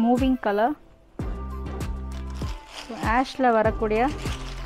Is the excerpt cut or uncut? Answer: uncut